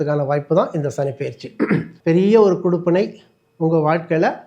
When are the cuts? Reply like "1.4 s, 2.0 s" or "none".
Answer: 1.9 s